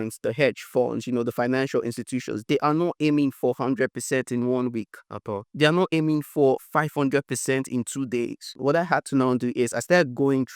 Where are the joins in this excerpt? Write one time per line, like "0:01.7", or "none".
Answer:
0:08.6